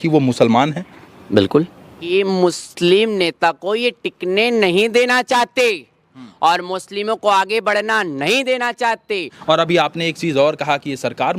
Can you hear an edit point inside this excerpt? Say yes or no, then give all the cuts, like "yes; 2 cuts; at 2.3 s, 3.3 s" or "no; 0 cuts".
yes; 2 cuts; at 2.1 s, 9.3 s